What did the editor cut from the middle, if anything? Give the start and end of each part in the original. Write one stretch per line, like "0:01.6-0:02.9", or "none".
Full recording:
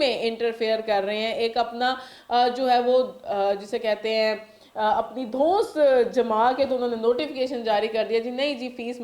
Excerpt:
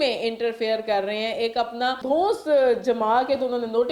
0:02.0-0:05.3